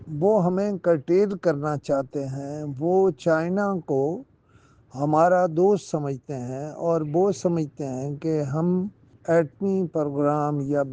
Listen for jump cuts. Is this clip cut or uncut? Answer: uncut